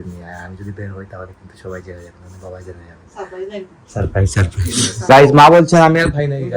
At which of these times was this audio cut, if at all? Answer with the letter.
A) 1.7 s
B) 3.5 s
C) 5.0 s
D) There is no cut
C